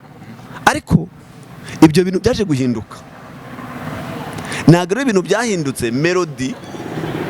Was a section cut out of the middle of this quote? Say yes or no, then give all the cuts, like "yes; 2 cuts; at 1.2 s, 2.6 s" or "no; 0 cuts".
no; 0 cuts